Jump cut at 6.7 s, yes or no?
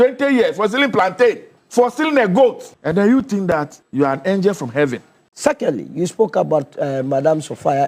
no